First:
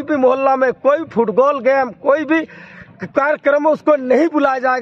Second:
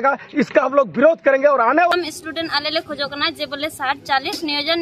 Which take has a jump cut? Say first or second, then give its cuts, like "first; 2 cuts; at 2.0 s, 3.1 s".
second; 1 cut; at 1.9 s